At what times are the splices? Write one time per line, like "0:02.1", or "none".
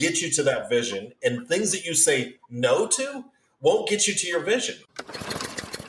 0:04.7